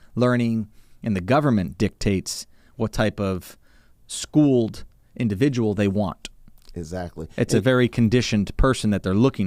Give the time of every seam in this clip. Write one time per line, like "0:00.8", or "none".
none